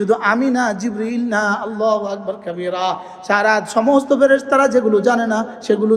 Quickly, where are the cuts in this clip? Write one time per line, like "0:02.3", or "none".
none